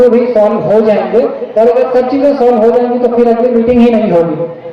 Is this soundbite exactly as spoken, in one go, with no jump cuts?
yes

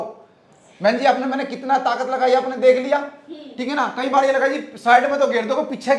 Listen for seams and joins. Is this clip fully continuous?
yes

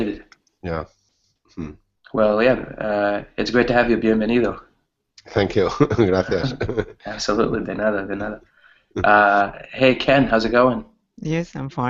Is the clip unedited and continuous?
yes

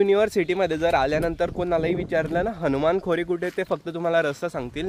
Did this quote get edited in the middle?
no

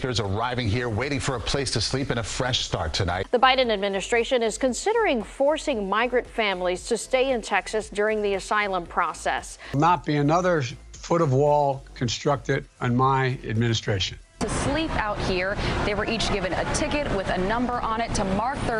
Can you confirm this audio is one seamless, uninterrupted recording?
yes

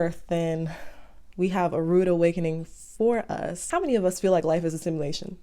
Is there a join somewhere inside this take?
yes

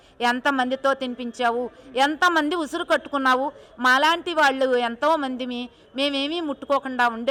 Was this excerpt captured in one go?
yes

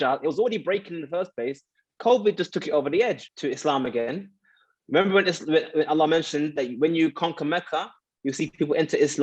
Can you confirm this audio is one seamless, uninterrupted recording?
no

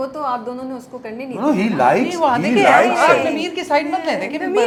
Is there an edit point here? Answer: no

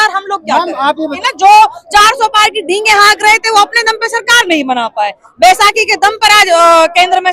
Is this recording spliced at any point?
yes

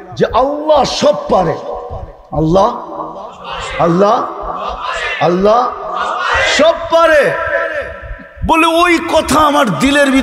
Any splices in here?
no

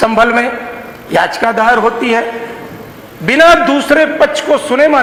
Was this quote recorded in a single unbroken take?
yes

